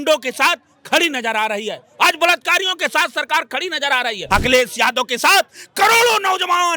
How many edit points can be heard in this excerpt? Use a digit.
1